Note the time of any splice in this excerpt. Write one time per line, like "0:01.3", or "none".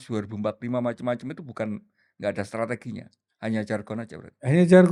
none